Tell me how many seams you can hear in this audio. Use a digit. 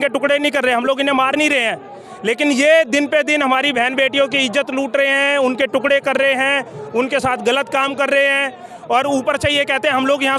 0